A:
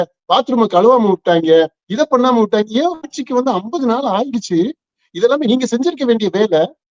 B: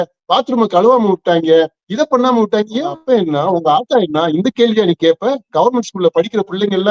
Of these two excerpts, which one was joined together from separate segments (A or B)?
B